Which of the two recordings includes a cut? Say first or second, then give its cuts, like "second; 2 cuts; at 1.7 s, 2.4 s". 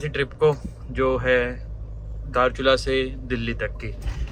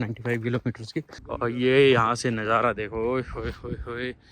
second; 1 cut; at 1.2 s